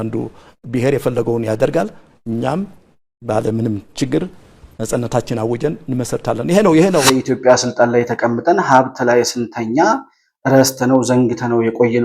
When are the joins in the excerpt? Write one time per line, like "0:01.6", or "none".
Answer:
0:07.1

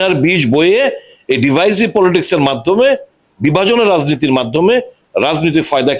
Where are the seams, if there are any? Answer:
none

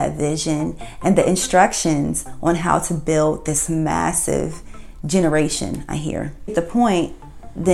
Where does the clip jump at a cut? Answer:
0:06.5

